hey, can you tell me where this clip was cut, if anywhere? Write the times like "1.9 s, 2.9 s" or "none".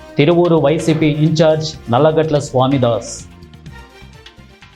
3.6 s